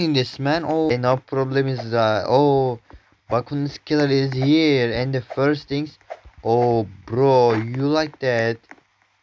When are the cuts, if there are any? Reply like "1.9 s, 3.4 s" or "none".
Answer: 0.9 s